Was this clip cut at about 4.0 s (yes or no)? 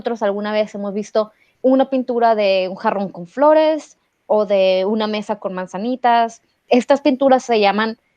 no